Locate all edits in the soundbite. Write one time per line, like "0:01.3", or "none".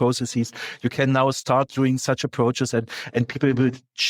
none